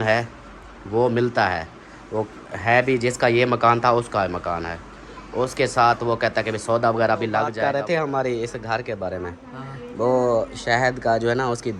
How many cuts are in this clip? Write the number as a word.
one